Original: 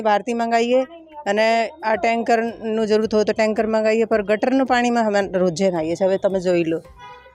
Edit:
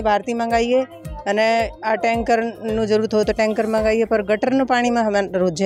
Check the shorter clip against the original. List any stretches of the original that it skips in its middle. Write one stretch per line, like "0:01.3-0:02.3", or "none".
none